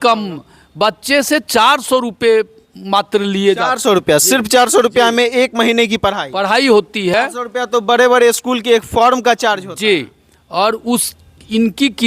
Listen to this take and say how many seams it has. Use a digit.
0